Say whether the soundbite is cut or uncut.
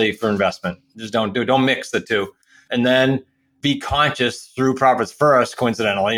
cut